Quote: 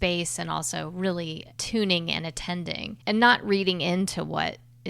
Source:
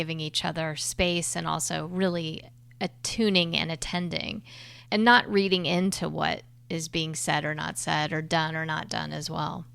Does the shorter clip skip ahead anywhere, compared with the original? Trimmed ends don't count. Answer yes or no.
yes